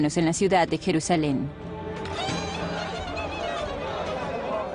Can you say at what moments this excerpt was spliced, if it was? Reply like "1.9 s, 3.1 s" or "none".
none